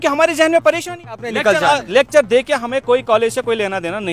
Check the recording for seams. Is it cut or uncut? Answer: cut